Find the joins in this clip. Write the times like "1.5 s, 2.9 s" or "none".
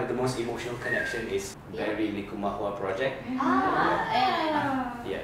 1.5 s